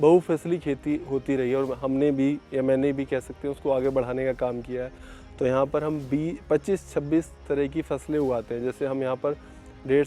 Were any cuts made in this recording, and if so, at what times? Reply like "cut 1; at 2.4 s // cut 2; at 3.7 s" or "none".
none